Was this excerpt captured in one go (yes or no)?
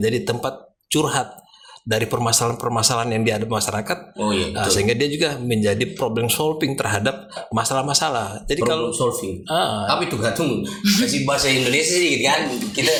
yes